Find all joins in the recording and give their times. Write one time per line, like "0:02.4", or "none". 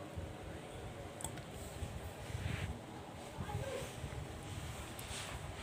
none